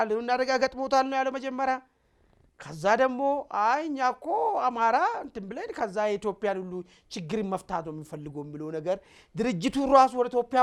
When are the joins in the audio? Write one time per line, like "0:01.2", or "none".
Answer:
none